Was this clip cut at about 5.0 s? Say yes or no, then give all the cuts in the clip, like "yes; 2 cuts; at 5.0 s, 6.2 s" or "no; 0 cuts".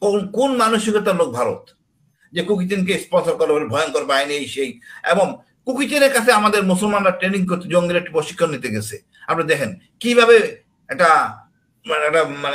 no; 1 cut; at 2.2 s